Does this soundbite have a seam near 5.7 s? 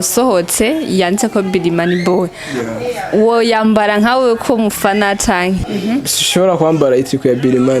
yes; 1 cut; at 5.7 s

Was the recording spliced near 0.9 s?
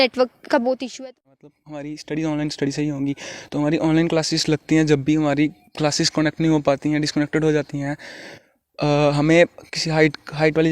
yes; 1 cut; at 0.9 s

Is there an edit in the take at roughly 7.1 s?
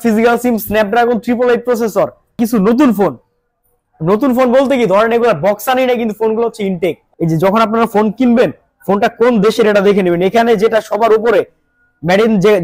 yes; 2 cuts; at 2.4 s, 7.1 s

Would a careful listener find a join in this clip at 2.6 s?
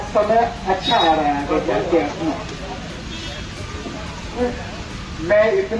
no; 0 cuts

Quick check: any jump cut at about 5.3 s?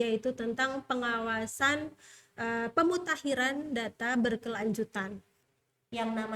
yes; 1 cut; at 5.3 s

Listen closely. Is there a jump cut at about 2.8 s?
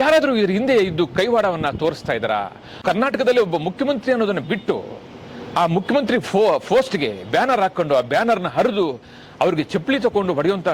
yes; 1 cut; at 2.8 s

